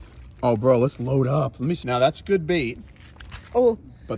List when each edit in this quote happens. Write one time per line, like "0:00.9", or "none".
0:01.8